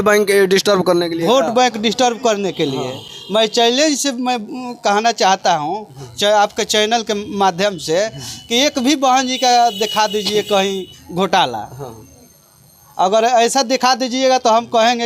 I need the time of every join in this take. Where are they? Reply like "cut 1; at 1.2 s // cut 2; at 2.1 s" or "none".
none